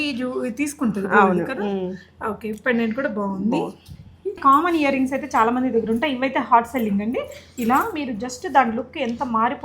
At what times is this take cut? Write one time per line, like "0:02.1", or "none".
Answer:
0:04.4